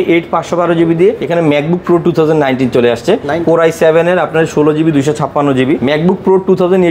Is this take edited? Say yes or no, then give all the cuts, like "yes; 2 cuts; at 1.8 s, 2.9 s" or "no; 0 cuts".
yes; 2 cuts; at 1.2 s, 5.8 s